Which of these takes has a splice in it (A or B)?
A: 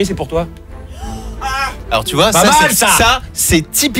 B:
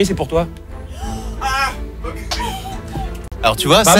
A